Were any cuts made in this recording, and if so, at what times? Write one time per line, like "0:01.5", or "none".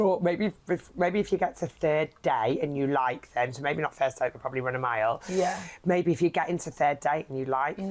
none